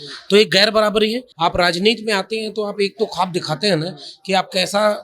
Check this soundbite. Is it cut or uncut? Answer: cut